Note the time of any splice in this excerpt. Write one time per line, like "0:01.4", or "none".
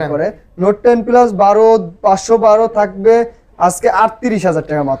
none